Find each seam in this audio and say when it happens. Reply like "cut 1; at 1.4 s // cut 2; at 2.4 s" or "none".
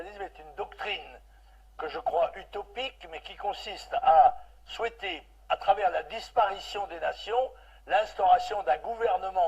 cut 1; at 4.6 s